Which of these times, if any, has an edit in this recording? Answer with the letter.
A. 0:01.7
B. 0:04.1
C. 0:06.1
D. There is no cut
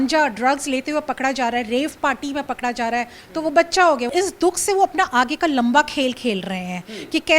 B